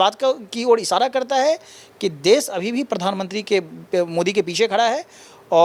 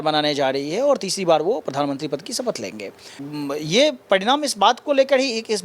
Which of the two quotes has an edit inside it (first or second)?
second